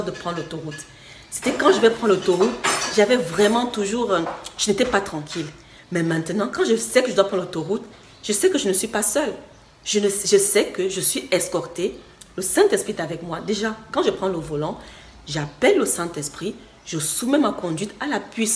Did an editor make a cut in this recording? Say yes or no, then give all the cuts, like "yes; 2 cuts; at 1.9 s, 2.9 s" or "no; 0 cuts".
no; 0 cuts